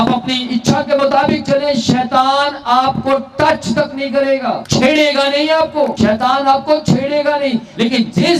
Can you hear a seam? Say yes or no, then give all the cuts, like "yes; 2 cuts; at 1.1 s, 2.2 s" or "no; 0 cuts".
yes; 2 cuts; at 4.6 s, 5.9 s